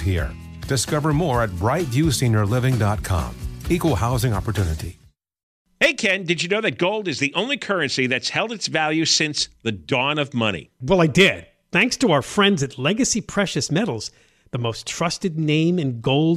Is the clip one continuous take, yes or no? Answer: no